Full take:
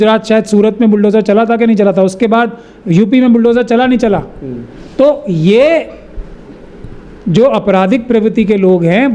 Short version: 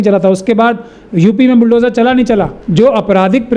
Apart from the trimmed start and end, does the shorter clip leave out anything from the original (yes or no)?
yes